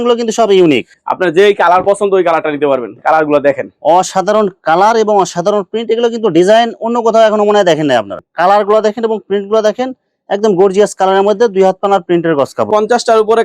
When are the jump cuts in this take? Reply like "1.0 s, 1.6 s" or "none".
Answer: 0.9 s, 8.2 s, 12.7 s

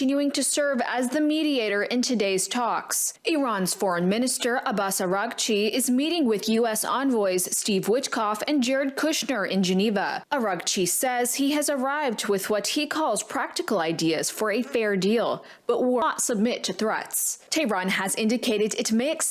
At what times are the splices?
16.0 s

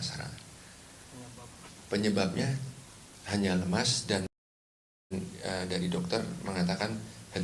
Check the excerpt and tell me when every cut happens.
none

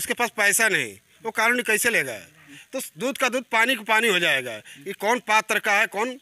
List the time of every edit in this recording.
2.5 s

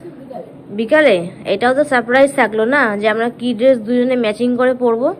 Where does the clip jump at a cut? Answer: none

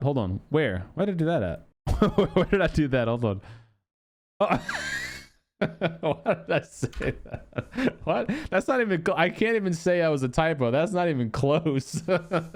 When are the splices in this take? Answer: none

